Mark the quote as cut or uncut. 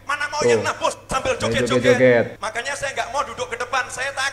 cut